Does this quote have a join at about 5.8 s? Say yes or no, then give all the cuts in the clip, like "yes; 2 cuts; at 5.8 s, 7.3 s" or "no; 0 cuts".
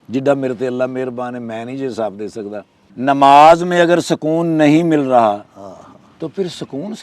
no; 1 cut; at 2.8 s